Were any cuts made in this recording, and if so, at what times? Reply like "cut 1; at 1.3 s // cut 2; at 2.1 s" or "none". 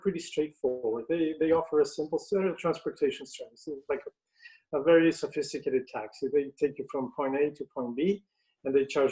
none